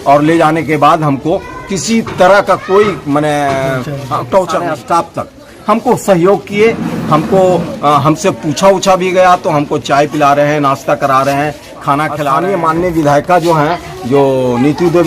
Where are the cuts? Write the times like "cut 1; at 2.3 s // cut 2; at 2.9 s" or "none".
cut 1; at 4.8 s // cut 2; at 12.3 s